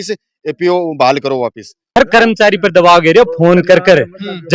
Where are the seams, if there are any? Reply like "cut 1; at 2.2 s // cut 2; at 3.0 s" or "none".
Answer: cut 1; at 1.9 s